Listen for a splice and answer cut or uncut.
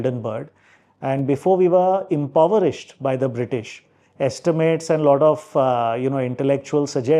uncut